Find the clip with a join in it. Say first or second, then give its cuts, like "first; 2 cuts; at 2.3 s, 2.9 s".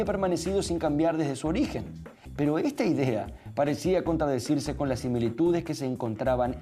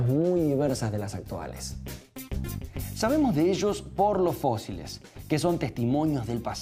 second; 1 cut; at 3.5 s